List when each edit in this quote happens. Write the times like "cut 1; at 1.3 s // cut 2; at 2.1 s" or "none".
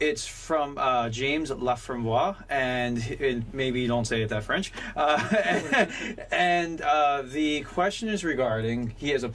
none